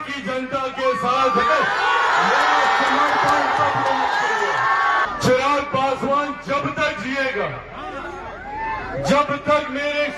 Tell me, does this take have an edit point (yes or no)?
yes